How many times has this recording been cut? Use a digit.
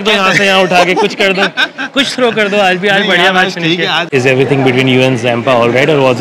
1